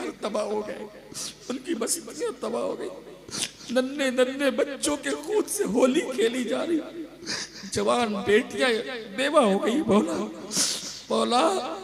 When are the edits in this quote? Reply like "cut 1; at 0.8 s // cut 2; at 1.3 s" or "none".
none